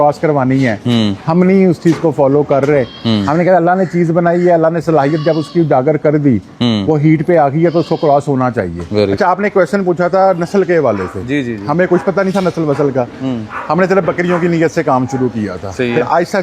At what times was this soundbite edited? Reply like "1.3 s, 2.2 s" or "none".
9.1 s